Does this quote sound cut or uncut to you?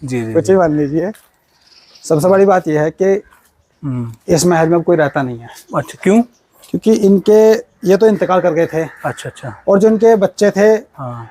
uncut